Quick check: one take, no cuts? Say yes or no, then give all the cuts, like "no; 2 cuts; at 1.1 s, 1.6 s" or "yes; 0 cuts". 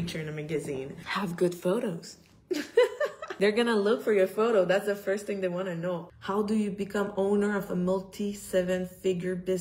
no; 3 cuts; at 1.0 s, 3.2 s, 6.1 s